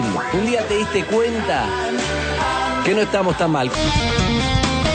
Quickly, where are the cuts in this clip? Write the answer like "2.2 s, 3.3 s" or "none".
3.7 s